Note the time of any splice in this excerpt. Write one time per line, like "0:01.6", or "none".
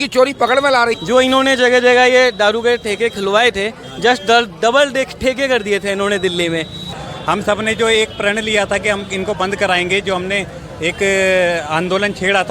0:01.0
0:07.0